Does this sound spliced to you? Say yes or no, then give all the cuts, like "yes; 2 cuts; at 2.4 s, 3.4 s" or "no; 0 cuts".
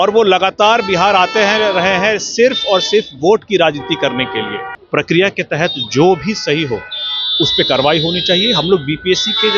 yes; 1 cut; at 4.8 s